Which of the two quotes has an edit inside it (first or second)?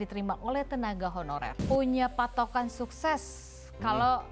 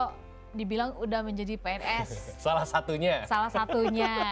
first